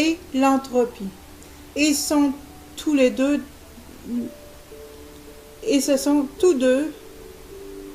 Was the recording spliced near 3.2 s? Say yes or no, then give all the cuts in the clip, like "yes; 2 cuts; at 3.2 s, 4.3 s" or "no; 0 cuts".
no; 1 cut; at 1.9 s